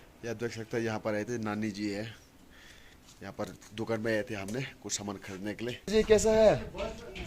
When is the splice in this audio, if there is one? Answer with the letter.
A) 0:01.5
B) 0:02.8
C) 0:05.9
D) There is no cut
C